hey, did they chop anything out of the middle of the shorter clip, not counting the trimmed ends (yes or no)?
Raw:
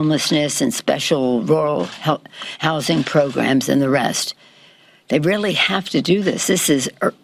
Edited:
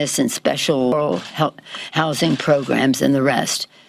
yes